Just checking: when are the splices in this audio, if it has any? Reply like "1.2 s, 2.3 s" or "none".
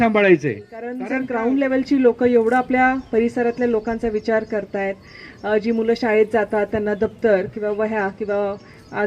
1.0 s